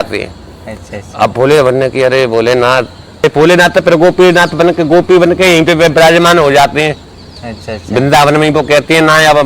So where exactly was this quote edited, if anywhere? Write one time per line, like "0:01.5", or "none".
0:03.2

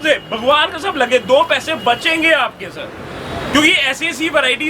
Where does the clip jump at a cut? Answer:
none

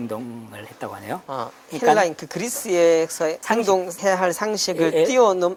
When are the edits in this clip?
none

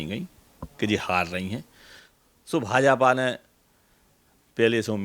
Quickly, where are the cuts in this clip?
none

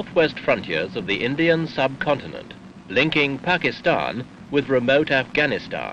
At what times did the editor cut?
0:04.1

